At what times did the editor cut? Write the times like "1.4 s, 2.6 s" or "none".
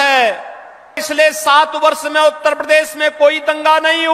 1.0 s